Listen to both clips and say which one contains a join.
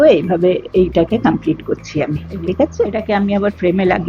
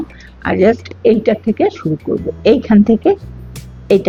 first; 1 cut; at 2.9 s

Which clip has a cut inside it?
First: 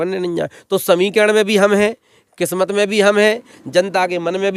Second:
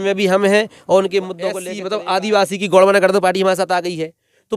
second; 1 cut; at 1.7 s

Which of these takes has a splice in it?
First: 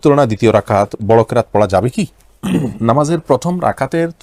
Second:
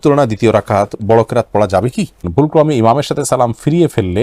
second; 1 cut; at 2.3 s

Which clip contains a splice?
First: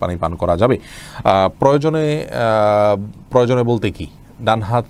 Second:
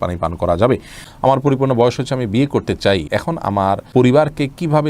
second; 2 cuts; at 1.0 s, 3.5 s

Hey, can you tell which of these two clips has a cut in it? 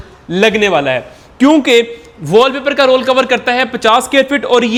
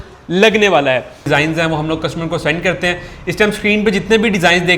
second; 1 cut; at 1.2 s

